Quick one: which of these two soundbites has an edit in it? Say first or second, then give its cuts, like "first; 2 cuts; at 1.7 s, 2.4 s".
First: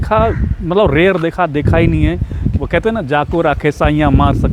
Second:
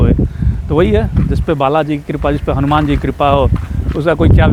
first; 1 cut; at 2.4 s